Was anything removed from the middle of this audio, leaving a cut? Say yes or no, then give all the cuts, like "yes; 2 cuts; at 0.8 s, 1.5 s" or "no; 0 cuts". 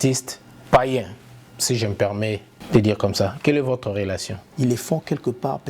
yes; 2 cuts; at 2.5 s, 4.4 s